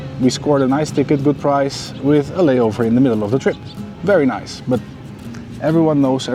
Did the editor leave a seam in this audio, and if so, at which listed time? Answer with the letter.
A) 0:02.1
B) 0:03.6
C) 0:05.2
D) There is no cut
D